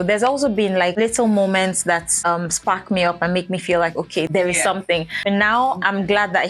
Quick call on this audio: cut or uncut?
cut